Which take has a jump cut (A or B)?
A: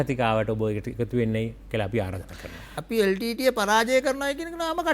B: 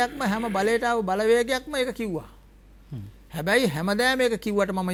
A